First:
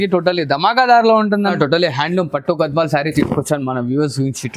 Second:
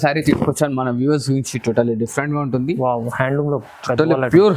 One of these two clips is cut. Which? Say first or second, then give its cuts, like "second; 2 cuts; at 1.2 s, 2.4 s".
first; 1 cut; at 1.5 s